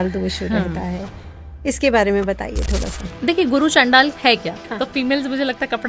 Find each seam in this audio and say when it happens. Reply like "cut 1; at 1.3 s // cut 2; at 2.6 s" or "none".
cut 1; at 4.7 s